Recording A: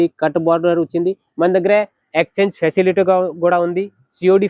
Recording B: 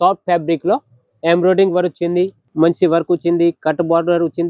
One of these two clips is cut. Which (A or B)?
B